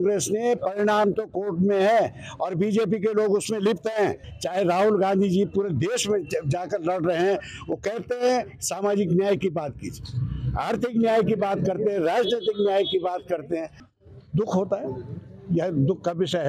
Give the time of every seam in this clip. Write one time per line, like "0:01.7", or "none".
0:04.2
0:13.9